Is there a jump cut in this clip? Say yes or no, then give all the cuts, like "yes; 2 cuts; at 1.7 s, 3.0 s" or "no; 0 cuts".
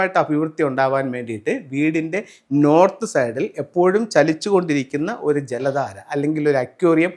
no; 0 cuts